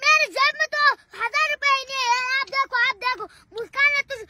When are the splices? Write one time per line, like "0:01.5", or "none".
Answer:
none